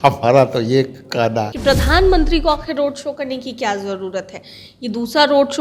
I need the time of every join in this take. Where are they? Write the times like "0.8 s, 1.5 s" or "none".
1.5 s